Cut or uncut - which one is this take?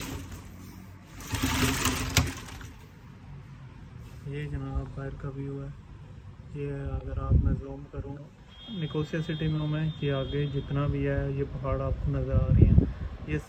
uncut